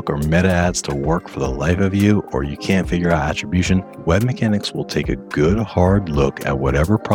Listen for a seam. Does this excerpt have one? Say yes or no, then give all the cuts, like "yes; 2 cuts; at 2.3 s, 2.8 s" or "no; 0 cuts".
no; 0 cuts